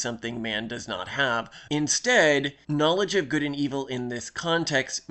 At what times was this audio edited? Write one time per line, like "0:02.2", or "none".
0:01.6
0:02.6